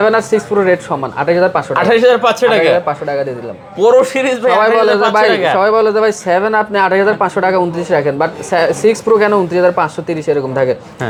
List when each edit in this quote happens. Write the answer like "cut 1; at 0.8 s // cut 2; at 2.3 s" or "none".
none